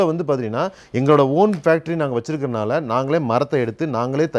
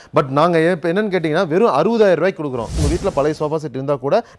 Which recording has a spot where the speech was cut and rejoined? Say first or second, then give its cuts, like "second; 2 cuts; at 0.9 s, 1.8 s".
second; 1 cut; at 2.8 s